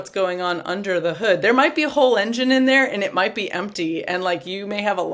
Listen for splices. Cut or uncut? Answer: uncut